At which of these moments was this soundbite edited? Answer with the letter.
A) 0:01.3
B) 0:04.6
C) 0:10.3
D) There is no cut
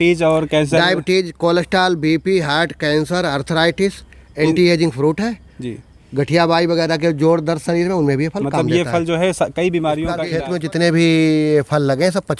C